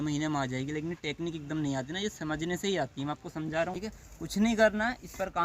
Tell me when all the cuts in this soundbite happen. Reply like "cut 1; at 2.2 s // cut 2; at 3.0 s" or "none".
cut 1; at 3.7 s